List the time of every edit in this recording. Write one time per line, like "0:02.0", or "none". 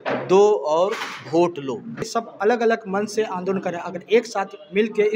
0:02.0